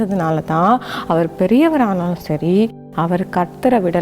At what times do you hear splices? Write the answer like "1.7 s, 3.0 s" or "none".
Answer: 2.8 s